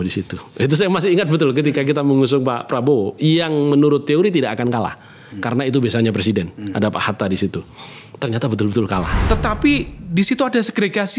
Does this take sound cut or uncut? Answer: cut